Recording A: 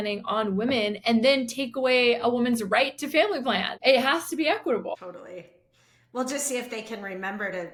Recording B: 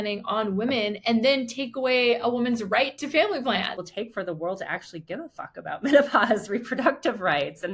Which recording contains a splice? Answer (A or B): B